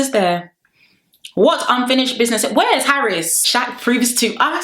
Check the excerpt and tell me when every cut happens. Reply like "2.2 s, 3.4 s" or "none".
3.5 s